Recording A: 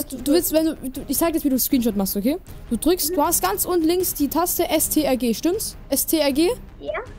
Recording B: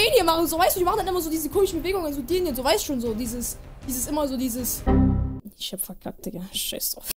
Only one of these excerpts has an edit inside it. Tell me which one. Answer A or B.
B